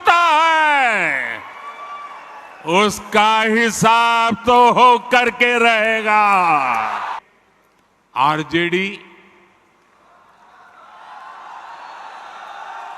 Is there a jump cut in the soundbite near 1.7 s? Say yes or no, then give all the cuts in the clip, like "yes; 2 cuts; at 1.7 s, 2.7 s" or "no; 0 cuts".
no; 1 cut; at 7.1 s